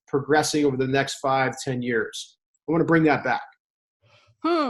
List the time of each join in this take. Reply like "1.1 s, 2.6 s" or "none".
2.5 s

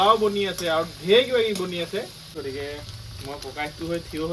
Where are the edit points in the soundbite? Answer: 2.2 s

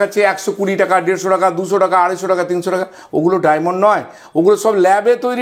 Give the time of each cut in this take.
none

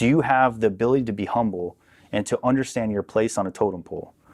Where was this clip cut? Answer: none

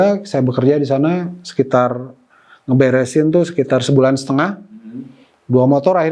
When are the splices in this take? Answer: none

